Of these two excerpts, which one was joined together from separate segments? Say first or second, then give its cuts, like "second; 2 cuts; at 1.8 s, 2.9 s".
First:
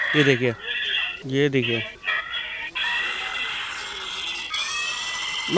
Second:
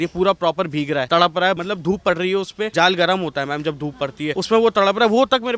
second; 4 cuts; at 1.1 s, 1.6 s, 2.7 s, 4.3 s